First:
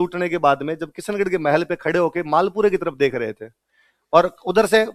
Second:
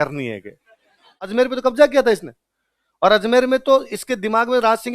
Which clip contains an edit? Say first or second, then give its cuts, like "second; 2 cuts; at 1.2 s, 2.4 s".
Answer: second; 1 cut; at 1.2 s